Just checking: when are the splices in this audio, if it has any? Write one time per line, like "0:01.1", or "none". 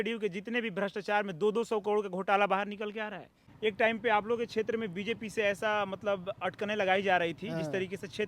0:03.5